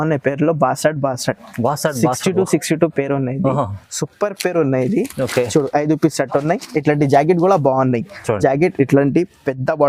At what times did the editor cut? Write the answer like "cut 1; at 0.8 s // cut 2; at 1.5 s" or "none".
none